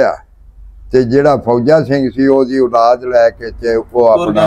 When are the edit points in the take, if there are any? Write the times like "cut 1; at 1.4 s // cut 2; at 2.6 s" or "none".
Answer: none